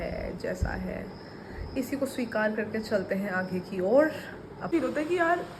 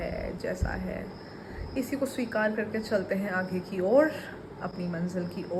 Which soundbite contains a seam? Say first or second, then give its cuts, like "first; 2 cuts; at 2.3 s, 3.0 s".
first; 1 cut; at 4.7 s